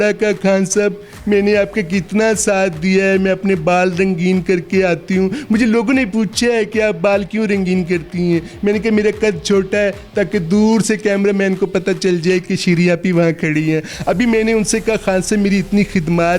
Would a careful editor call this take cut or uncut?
uncut